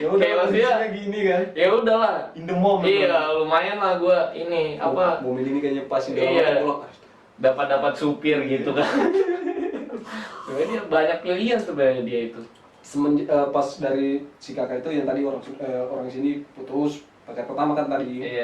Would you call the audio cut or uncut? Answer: uncut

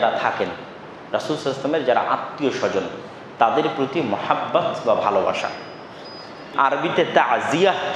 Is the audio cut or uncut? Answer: cut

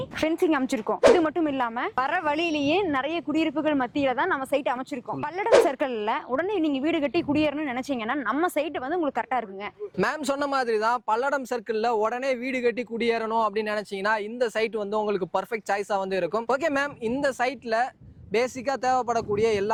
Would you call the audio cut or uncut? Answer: uncut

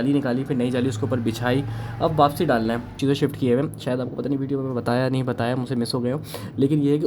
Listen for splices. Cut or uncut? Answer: cut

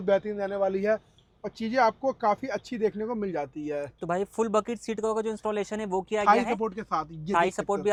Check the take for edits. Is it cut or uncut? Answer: uncut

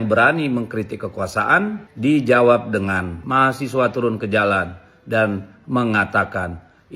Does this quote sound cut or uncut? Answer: cut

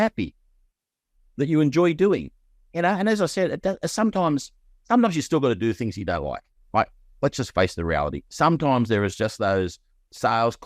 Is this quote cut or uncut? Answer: uncut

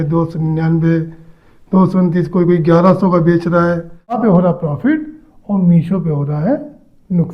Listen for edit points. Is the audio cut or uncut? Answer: cut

